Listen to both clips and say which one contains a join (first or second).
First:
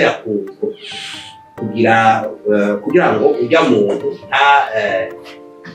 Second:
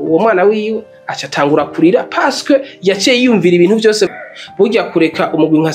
second